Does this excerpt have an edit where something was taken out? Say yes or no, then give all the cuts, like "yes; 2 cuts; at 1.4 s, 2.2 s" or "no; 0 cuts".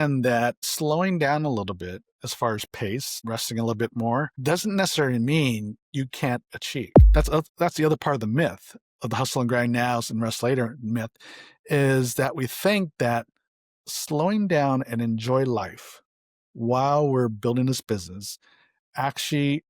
yes; 1 cut; at 7.0 s